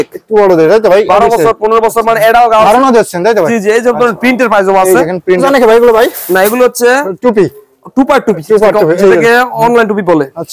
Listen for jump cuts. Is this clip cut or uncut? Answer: cut